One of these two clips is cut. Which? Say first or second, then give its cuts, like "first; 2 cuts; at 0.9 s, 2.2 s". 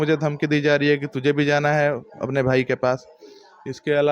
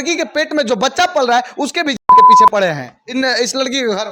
second; 2 cuts; at 2.0 s, 2.5 s